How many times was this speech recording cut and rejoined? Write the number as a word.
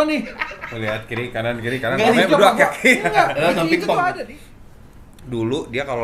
one